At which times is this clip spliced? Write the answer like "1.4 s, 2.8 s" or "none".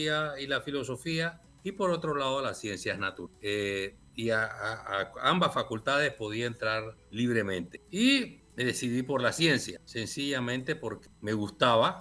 1.5 s, 3.2 s, 7.0 s, 7.8 s, 8.4 s, 9.8 s, 11.0 s